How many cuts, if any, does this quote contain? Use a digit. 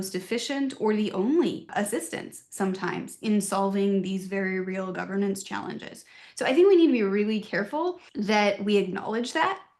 2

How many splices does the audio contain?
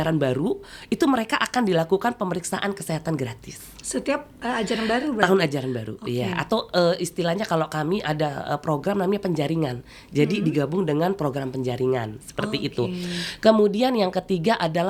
0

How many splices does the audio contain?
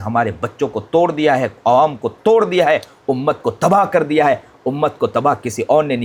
0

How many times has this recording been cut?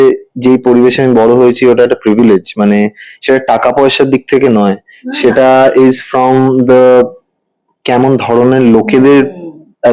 0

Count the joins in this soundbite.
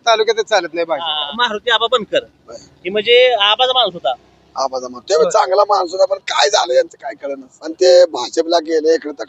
2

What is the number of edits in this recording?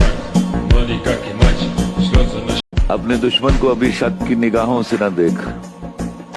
1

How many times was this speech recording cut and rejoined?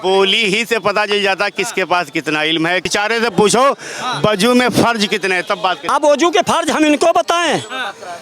2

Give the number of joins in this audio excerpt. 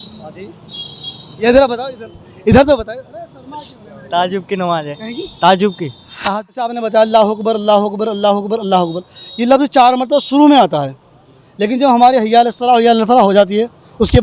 1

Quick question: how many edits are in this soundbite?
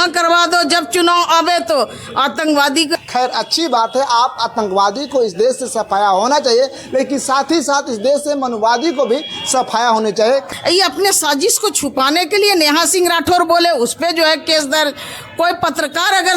2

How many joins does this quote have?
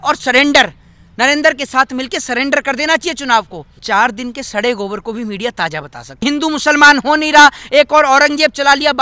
2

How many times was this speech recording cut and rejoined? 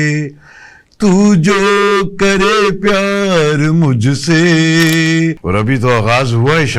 1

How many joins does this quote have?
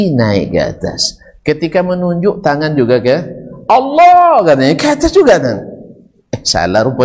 0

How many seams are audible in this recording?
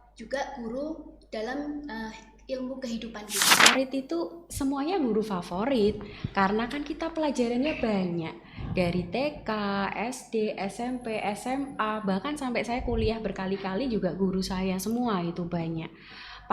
1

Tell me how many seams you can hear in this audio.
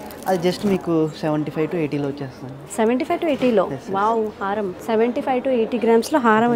0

